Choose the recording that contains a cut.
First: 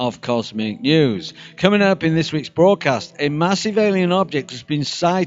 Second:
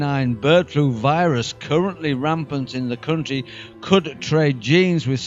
second; 1 cut; at 1.0 s

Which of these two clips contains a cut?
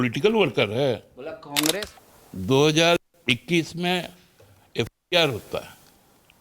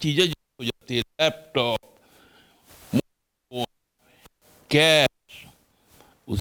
first; 1 cut; at 1.8 s

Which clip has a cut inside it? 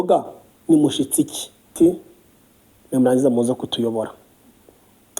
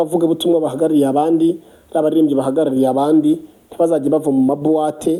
first; 1 cut; at 1.7 s

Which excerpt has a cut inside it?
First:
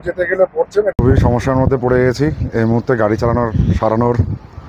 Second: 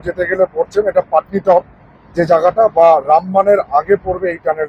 first; 1 cut; at 0.9 s

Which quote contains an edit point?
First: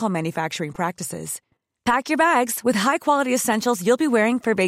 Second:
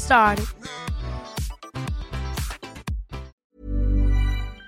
second; 1 cut; at 3.4 s

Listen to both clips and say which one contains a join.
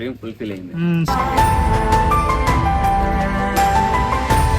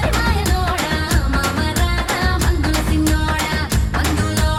first; 1 cut; at 1.1 s

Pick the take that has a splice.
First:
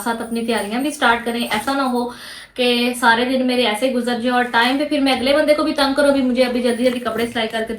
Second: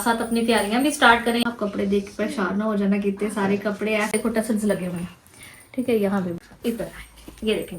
second; 3 cuts; at 1.5 s, 4.1 s, 6.4 s

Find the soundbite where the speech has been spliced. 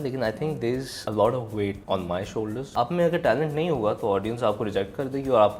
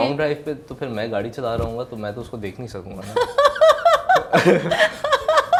first; 3 cuts; at 1.0 s, 1.8 s, 2.6 s

